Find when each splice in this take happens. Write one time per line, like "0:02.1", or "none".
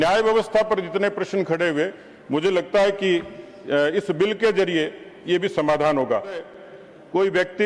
0:06.6